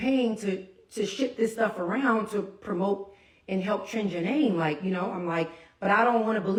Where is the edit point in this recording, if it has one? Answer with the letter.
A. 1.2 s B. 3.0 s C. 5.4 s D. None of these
D